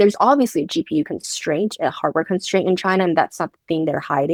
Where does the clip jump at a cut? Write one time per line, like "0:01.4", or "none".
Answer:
none